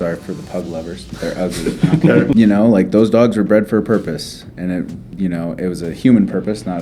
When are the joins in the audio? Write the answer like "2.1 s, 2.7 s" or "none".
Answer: 2.3 s